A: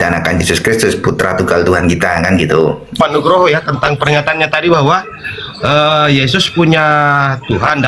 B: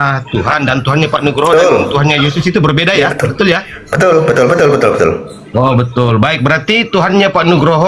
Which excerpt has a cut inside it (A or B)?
A